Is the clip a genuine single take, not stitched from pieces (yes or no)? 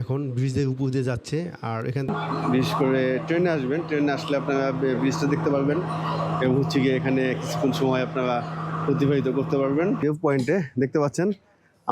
no